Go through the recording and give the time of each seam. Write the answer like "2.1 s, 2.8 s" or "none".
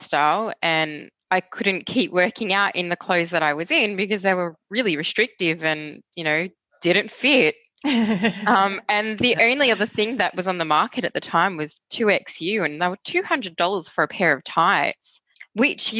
1.1 s